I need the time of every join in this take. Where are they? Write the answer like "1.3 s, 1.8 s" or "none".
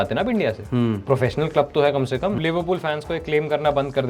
2.4 s